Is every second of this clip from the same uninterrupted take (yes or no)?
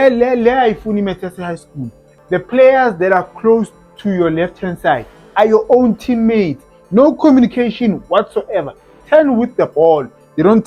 no